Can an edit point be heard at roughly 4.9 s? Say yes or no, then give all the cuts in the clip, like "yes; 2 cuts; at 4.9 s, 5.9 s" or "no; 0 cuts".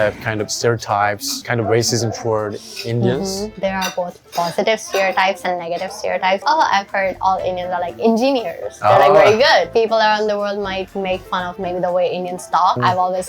no; 3 cuts; at 1.4 s, 3.5 s, 9.7 s